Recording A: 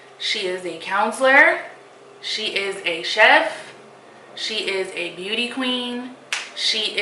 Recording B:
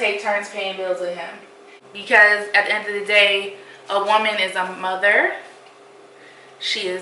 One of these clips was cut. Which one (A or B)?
B